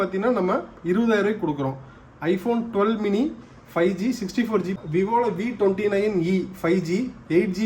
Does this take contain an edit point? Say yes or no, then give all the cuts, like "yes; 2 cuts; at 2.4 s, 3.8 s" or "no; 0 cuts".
yes; 1 cut; at 4.8 s